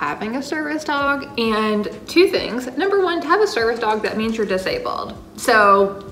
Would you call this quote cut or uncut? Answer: uncut